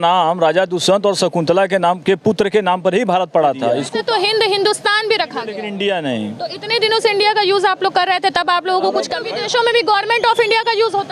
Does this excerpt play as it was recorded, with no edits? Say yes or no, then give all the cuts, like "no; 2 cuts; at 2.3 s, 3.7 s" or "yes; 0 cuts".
no; 3 cuts; at 3.8 s, 5.6 s, 9.2 s